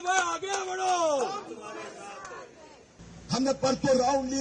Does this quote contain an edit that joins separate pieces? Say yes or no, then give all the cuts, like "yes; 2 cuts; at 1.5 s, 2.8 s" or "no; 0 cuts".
yes; 1 cut; at 3.0 s